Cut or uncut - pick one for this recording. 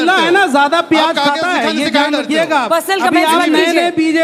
uncut